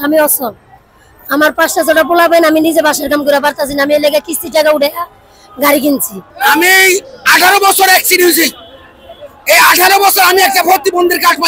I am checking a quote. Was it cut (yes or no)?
yes